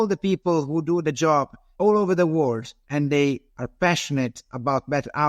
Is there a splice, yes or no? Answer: yes